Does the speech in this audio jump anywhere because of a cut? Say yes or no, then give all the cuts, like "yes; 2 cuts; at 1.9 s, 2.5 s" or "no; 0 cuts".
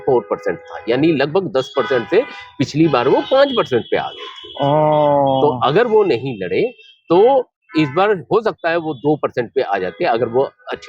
no; 0 cuts